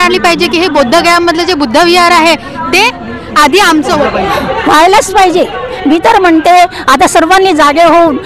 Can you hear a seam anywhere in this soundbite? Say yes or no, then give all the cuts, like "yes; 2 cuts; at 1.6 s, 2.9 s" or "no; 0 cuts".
yes; 1 cut; at 4.0 s